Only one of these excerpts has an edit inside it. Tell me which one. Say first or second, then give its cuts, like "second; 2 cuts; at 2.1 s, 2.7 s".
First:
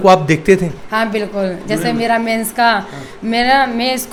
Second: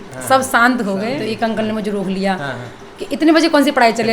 second; 1 cut; at 1.2 s